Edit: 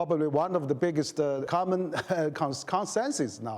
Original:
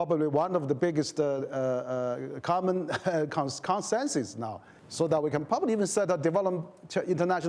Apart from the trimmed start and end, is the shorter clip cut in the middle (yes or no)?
yes